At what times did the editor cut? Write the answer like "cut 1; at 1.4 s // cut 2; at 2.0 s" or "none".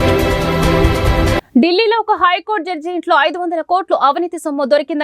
cut 1; at 1.4 s